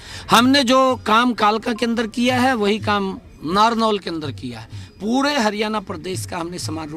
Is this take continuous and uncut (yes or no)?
yes